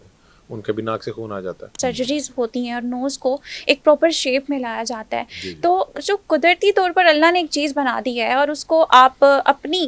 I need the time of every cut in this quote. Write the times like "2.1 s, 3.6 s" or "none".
1.7 s